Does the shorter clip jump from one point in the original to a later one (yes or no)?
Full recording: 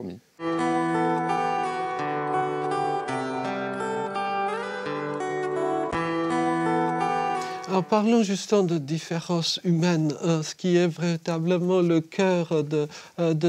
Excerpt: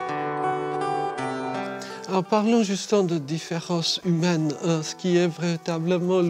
yes